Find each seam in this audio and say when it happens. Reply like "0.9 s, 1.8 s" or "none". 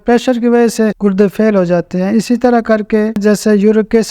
1.0 s, 3.2 s